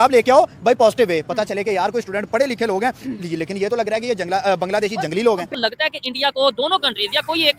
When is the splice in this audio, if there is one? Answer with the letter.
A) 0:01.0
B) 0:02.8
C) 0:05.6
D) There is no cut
C